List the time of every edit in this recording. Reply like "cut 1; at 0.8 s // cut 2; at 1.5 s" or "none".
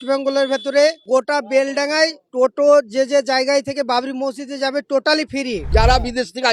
cut 1; at 1.0 s // cut 2; at 2.2 s // cut 3; at 5.6 s

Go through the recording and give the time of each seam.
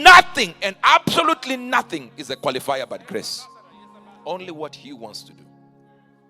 cut 1; at 5.2 s

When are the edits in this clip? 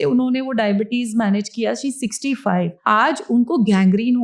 cut 1; at 2.8 s

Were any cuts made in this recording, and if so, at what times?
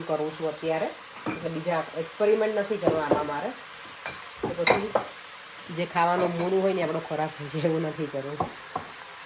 none

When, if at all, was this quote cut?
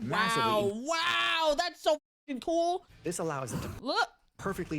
cut 1; at 2.9 s

